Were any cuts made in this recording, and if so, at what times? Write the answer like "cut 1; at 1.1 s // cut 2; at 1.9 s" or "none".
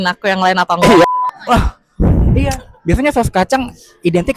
cut 1; at 1.0 s